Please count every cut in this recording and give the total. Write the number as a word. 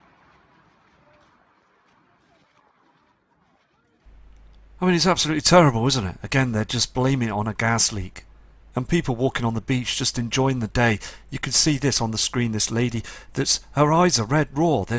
zero